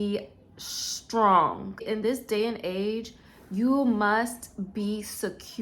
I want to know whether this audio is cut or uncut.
cut